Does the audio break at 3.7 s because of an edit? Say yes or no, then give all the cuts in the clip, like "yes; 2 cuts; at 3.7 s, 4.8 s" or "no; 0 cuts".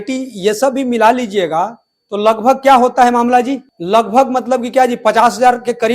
yes; 1 cut; at 3.7 s